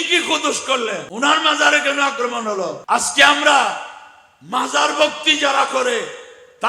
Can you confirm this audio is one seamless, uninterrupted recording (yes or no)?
no